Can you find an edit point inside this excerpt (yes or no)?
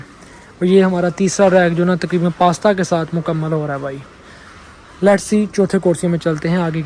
no